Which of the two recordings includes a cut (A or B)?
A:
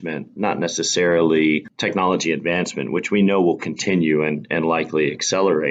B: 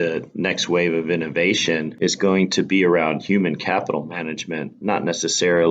B